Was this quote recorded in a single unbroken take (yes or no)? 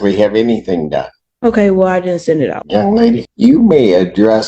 no